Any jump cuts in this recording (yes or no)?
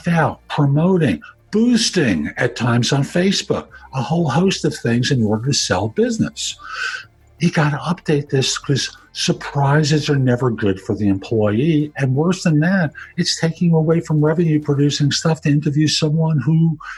no